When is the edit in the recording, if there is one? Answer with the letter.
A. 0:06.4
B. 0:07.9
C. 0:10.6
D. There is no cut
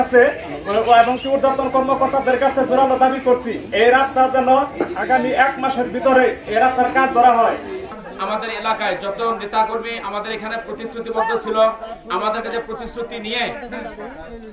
B